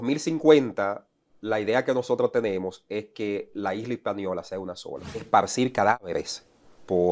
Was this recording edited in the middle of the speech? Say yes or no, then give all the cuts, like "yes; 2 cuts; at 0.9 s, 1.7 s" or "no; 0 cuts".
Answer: yes; 1 cut; at 5.2 s